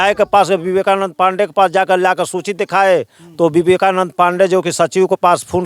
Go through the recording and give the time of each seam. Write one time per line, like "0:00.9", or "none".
none